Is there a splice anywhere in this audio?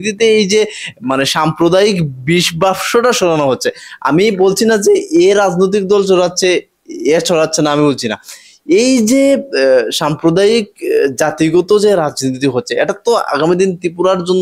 no; 0 cuts

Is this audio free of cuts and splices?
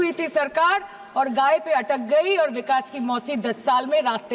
yes; 0 cuts

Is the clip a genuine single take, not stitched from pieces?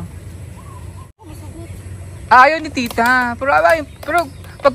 no; 1 cut; at 1.3 s

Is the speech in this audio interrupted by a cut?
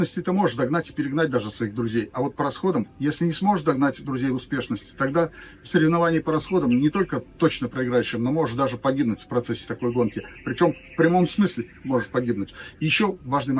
no; 0 cuts

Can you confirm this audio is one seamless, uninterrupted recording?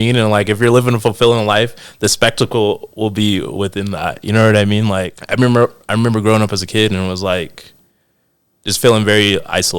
no; 1 cut; at 5.2 s

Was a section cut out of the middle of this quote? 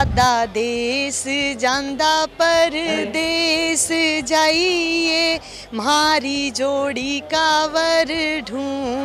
no; 0 cuts

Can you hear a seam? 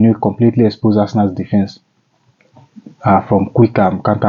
no; 0 cuts

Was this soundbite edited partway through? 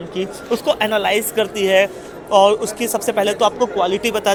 no; 0 cuts

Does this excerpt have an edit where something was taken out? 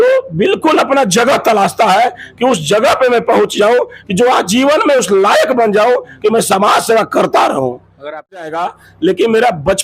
yes; 1 cut; at 8.5 s

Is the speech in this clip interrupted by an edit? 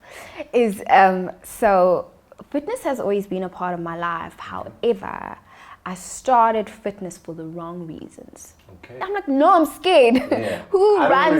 yes; 1 cut; at 9.0 s

